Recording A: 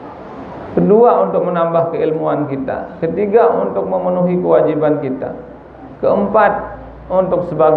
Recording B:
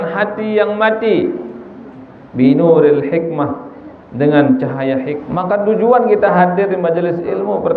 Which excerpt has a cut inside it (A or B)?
B